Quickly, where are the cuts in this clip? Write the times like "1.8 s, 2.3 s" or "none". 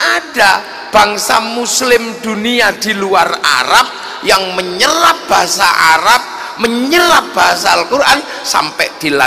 none